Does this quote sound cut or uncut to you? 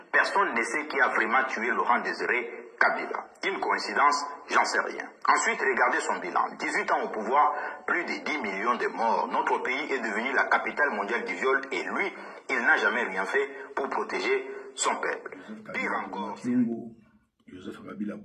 cut